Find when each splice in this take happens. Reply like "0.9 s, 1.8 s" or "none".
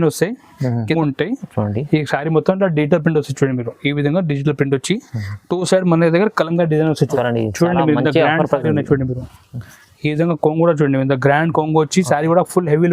0.9 s, 7.0 s

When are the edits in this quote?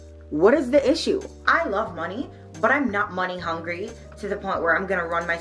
1.3 s

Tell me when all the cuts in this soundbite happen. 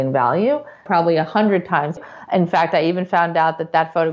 0.8 s, 2.0 s

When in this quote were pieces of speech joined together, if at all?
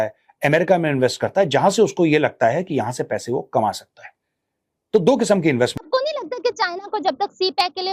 5.8 s

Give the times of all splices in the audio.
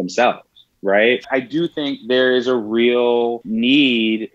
1.3 s, 3.4 s

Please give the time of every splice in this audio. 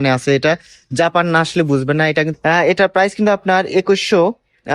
2.3 s

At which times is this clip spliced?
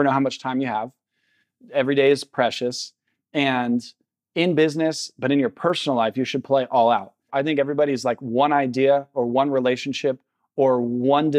7.3 s

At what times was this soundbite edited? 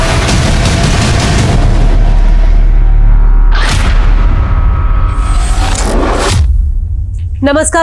6.4 s

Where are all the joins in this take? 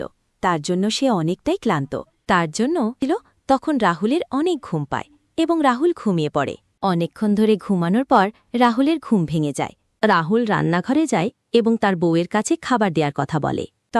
3.0 s

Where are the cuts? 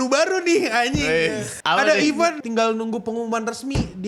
1.5 s, 2.4 s

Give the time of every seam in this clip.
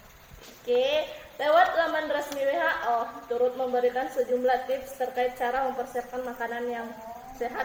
none

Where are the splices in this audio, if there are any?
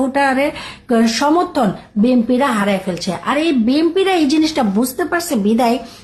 none

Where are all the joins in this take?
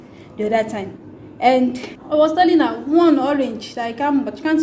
1.9 s

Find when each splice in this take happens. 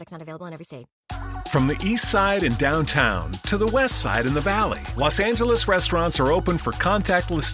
0.9 s

